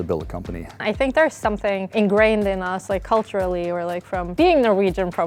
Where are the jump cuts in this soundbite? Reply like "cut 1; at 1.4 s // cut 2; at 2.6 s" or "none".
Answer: cut 1; at 0.8 s // cut 2; at 1.8 s // cut 3; at 4.3 s